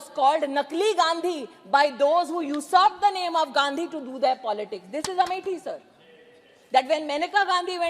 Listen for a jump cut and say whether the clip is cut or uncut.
uncut